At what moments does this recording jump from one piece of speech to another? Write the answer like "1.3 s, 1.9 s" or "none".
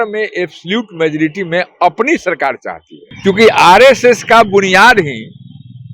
3.0 s